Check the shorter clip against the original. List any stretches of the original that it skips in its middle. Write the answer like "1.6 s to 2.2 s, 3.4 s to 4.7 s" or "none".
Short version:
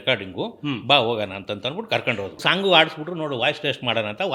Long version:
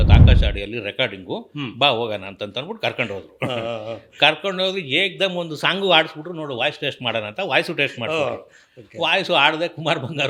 3.3 s to 5.5 s